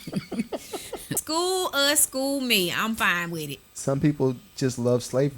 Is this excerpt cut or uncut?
cut